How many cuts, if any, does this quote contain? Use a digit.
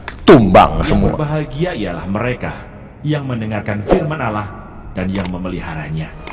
1